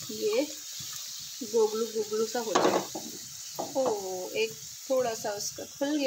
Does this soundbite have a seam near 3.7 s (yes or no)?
no